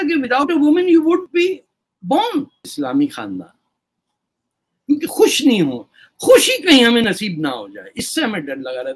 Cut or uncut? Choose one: cut